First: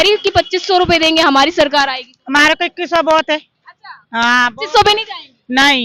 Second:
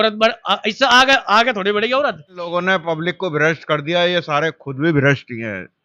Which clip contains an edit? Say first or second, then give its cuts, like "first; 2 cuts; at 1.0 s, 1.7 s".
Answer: second; 1 cut; at 2.5 s